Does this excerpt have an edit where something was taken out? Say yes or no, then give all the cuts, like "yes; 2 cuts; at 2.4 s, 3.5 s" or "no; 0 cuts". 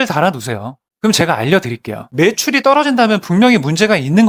no; 0 cuts